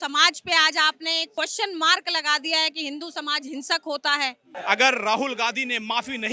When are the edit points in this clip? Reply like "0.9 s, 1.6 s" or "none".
4.5 s